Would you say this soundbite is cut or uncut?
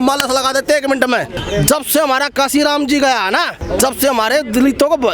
cut